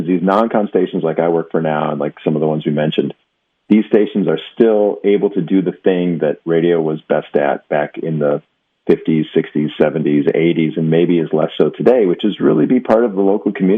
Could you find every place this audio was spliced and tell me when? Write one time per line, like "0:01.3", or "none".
none